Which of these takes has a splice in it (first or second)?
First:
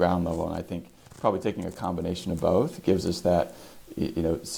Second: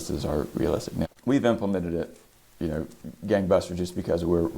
second